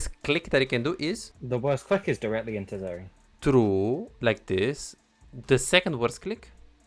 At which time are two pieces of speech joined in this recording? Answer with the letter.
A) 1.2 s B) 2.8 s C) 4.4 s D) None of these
A